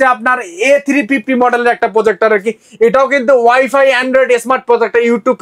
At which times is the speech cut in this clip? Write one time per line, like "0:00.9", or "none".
none